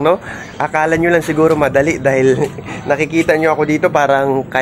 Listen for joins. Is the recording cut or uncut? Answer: uncut